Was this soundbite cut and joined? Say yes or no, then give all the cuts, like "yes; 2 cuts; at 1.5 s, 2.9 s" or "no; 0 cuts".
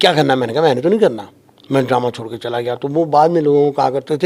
no; 0 cuts